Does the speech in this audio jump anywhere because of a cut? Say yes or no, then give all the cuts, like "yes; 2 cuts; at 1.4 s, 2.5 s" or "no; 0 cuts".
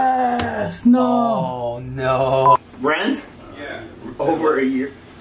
yes; 1 cut; at 2.7 s